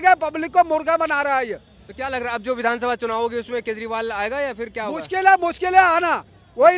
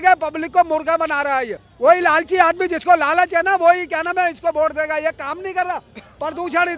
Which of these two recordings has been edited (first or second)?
second